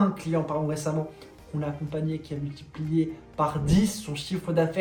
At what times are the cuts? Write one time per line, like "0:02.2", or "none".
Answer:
none